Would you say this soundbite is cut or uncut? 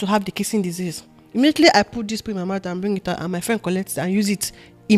uncut